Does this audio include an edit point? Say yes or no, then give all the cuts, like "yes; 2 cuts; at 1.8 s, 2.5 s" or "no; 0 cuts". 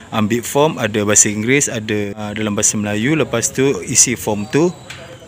yes; 1 cut; at 2.1 s